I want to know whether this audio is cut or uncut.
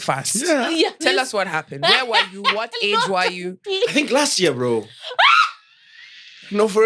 uncut